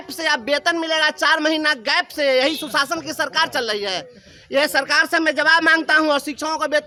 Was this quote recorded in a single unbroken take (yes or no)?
yes